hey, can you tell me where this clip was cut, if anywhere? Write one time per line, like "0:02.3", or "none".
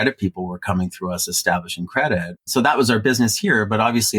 0:02.5